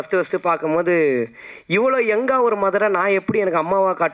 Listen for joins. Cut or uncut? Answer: uncut